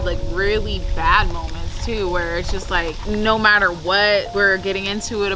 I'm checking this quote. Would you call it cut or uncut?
cut